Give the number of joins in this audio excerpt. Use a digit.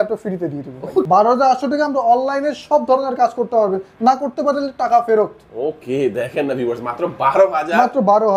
1